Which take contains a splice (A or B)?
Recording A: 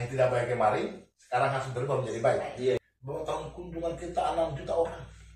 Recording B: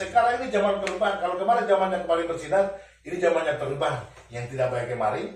A